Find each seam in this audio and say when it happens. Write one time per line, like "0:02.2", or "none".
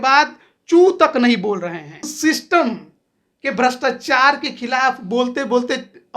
0:02.1